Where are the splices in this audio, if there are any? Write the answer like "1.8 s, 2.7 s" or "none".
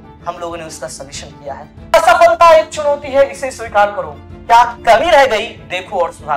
1.9 s